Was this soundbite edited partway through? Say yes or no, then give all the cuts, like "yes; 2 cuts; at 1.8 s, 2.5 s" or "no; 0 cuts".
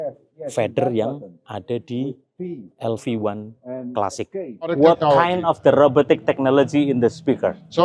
yes; 1 cut; at 4.7 s